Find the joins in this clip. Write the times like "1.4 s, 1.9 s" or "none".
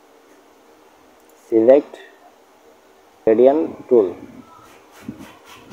3.3 s